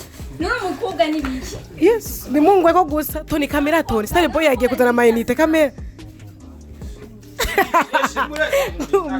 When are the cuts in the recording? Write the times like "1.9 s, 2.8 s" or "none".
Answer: 5.7 s, 7.4 s